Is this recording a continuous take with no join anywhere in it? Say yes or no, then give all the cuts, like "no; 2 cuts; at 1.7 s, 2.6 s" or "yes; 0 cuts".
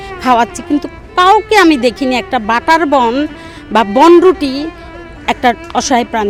yes; 0 cuts